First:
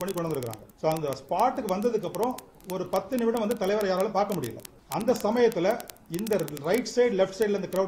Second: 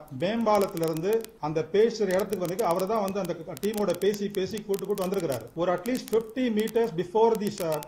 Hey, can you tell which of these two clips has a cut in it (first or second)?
second